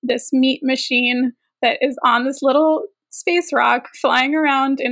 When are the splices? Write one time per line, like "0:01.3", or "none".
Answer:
none